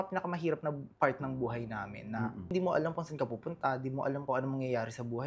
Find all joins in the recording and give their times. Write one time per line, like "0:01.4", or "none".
0:02.5
0:04.2